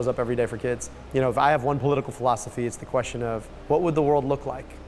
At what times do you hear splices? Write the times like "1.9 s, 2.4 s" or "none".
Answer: 0.9 s, 3.5 s